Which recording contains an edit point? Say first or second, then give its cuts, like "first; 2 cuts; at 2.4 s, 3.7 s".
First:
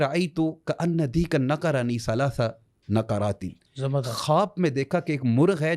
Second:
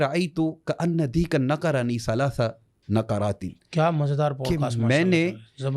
first; 1 cut; at 3.6 s